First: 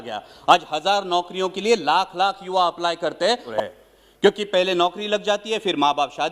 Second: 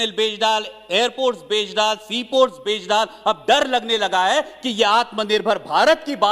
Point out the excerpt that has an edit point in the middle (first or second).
first